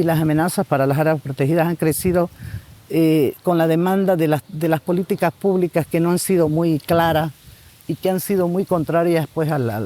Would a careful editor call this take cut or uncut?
uncut